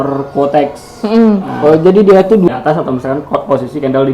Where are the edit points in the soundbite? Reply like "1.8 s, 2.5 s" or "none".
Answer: 2.5 s